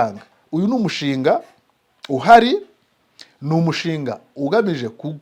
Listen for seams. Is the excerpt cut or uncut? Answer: uncut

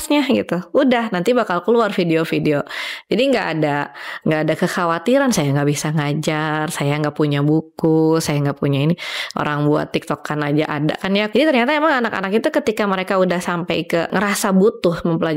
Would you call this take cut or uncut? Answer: cut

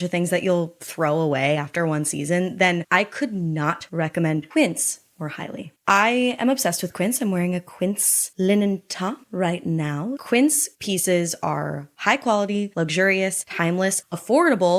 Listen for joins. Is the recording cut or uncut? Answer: cut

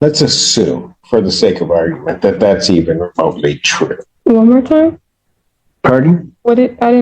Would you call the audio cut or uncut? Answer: cut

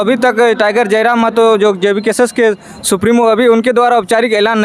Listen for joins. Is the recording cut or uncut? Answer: uncut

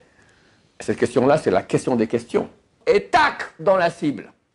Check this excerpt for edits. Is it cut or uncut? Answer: cut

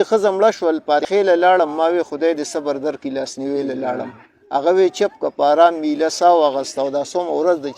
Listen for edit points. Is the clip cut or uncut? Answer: cut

